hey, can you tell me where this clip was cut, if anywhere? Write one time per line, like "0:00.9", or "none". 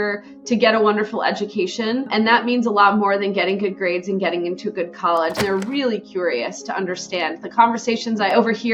0:05.4